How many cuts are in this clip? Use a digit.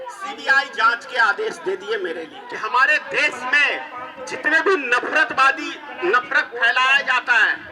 1